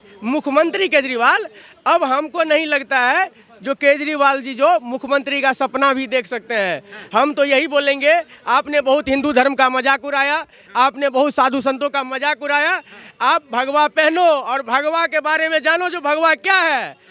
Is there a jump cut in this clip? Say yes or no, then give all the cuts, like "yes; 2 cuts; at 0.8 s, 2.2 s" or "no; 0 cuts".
no; 0 cuts